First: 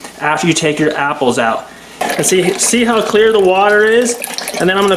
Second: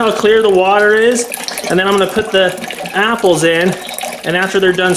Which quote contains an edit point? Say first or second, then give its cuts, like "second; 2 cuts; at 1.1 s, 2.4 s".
first; 1 cut; at 1.8 s